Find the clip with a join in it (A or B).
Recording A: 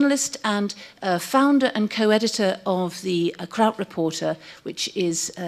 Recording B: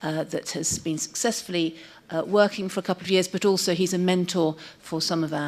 A